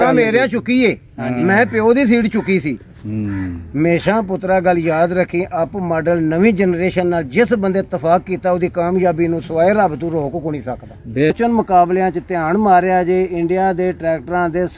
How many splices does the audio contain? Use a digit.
1